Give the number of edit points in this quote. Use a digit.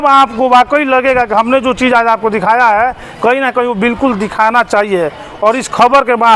0